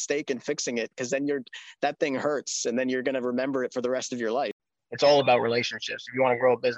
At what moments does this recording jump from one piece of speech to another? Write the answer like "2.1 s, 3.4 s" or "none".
4.6 s